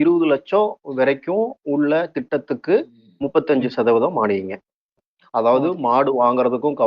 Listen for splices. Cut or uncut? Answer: cut